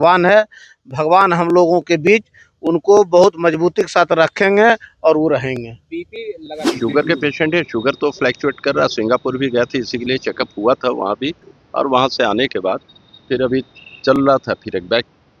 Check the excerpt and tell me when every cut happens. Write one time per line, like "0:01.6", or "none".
0:06.7
0:10.1